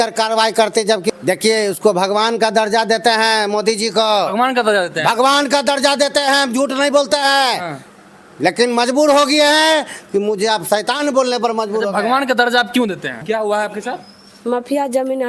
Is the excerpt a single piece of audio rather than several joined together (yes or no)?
no